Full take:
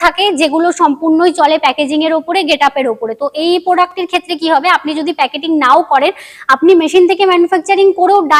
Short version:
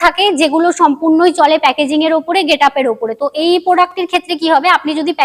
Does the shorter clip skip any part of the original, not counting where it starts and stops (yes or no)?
no